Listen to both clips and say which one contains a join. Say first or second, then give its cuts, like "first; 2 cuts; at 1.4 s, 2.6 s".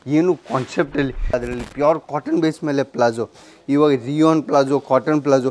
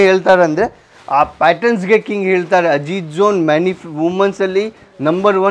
first; 1 cut; at 1.3 s